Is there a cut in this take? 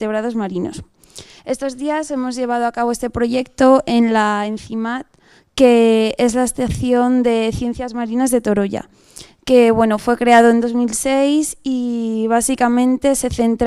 no; 0 cuts

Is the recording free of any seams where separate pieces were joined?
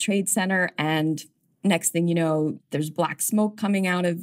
no; 2 cuts; at 1.5 s, 2.6 s

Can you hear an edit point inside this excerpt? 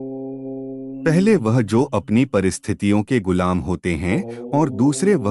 yes; 1 cut; at 1.0 s

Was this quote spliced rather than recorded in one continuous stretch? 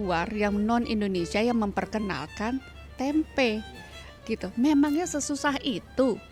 no; 0 cuts

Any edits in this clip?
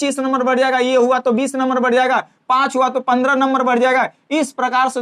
no; 0 cuts

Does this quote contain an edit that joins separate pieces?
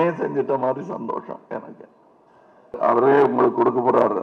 yes; 1 cut; at 2.8 s

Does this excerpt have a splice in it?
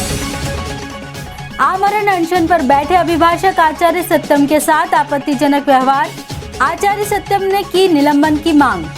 yes; 1 cut; at 1.3 s

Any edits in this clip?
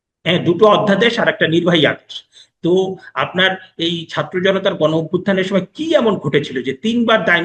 no; 0 cuts

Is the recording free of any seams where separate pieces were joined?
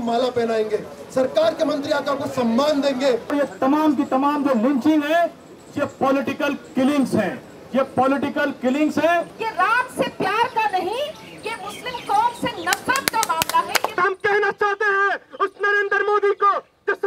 no; 3 cuts; at 3.3 s, 9.3 s, 13.9 s

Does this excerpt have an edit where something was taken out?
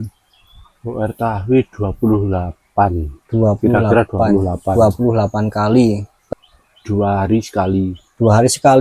yes; 1 cut; at 6.1 s

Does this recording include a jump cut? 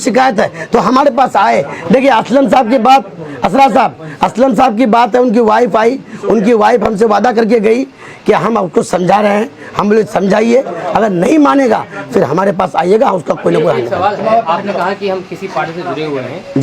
no; 0 cuts

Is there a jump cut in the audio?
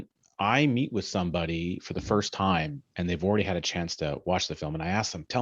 no; 0 cuts

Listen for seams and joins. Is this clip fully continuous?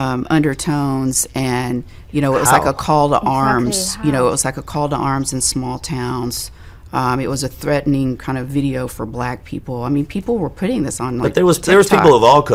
yes; 0 cuts

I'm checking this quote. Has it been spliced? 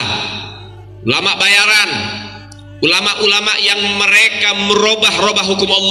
no; 0 cuts

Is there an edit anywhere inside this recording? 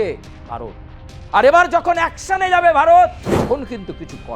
yes; 1 cut; at 3.2 s

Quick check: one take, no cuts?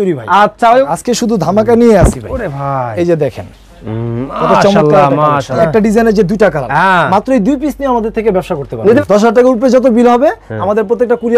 no; 3 cuts; at 0.8 s, 5.6 s, 9.0 s

